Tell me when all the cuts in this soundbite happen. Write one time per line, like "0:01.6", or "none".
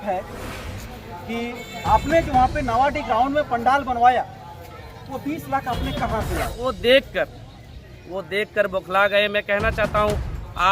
0:06.6